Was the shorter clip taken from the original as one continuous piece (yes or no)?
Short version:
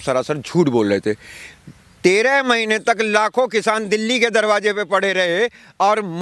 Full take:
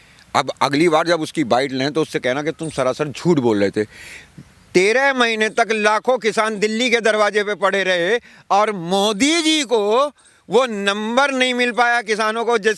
yes